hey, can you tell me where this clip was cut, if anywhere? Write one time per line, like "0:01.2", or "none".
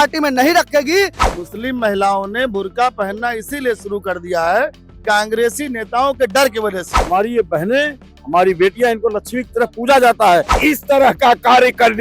0:01.2
0:06.9
0:10.5